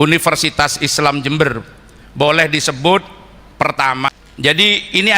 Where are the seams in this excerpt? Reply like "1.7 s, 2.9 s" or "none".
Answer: 4.1 s